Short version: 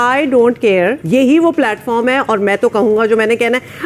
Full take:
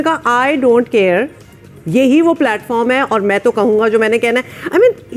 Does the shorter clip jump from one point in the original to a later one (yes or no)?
yes